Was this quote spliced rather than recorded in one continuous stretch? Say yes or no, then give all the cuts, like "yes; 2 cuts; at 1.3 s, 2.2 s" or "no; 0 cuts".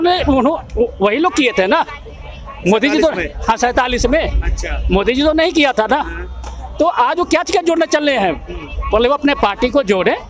no; 0 cuts